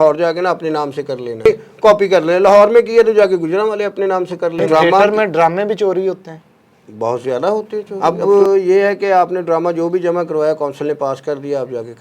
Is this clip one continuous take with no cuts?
no; 3 cuts; at 1.5 s, 4.6 s, 7.9 s

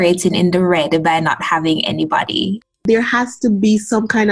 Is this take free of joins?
no; 1 cut; at 2.8 s

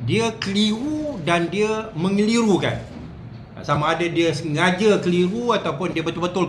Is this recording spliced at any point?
no; 0 cuts

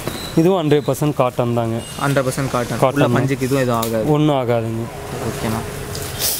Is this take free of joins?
yes; 0 cuts

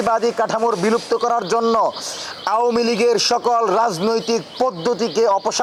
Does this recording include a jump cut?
no; 0 cuts

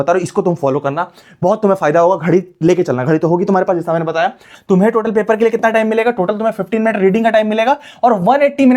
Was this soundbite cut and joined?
yes; 1 cut; at 4.4 s

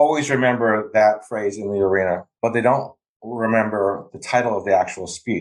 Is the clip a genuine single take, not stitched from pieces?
yes; 0 cuts

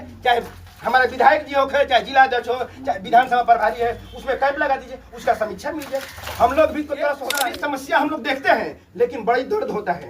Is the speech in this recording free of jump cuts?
no; 1 cut; at 7.3 s

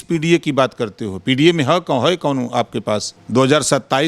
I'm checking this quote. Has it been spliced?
yes; 1 cut; at 3.1 s

